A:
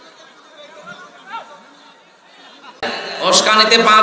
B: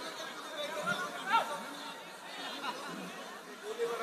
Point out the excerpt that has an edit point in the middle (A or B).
A